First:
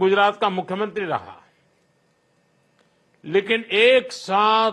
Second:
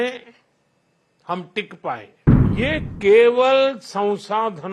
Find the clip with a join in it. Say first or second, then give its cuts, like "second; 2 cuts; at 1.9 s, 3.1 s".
second; 1 cut; at 2.5 s